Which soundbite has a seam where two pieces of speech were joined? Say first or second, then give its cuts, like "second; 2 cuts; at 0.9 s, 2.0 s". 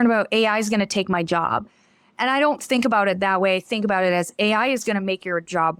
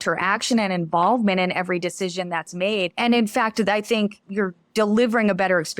second; 2 cuts; at 2.9 s, 4.2 s